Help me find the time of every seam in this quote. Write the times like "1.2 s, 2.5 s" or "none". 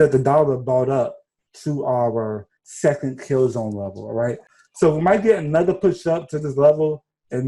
4.5 s